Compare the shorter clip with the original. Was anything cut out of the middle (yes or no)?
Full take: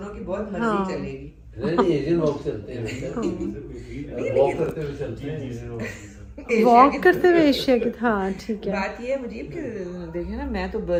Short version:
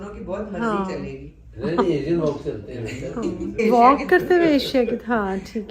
yes